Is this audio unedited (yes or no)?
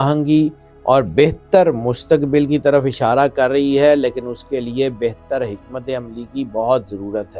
yes